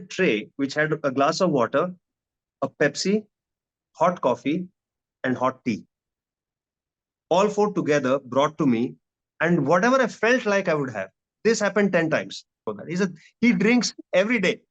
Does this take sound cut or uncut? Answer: cut